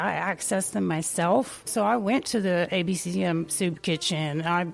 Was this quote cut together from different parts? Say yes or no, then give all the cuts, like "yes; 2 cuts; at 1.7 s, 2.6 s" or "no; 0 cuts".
no; 0 cuts